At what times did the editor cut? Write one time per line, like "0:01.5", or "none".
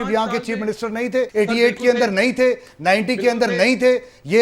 0:01.3